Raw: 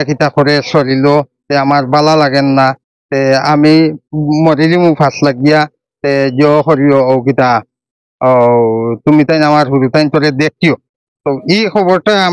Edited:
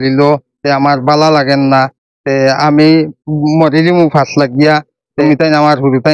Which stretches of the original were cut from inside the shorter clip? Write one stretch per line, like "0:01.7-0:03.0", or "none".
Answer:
0:06.0-0:09.0